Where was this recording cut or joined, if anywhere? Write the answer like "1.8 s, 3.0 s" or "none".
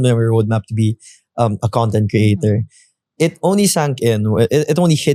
none